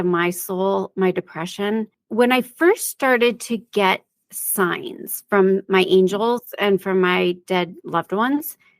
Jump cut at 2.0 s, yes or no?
yes